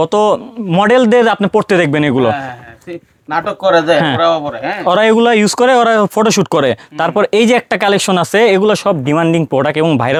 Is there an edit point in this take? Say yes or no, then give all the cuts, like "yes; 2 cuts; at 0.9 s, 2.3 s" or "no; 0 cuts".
no; 0 cuts